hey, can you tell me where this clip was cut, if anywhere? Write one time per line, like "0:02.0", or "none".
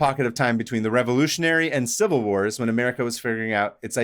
none